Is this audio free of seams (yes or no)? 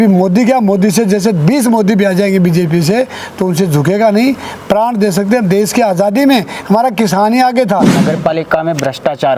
no